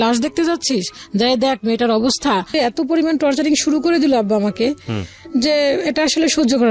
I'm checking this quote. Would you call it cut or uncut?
cut